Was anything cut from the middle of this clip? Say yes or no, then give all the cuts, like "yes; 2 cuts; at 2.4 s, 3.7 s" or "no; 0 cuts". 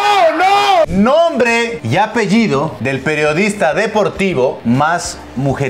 yes; 4 cuts; at 0.9 s, 1.8 s, 2.8 s, 4.6 s